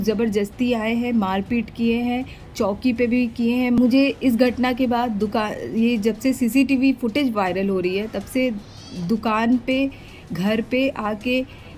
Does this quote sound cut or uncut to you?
cut